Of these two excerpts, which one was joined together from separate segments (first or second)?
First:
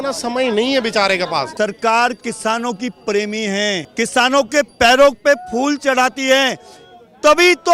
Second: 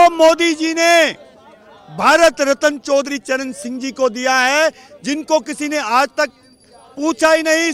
first